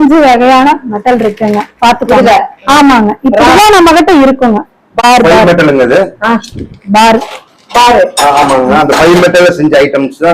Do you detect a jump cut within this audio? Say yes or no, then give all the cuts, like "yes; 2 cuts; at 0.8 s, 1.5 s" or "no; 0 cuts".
yes; 1 cut; at 5.0 s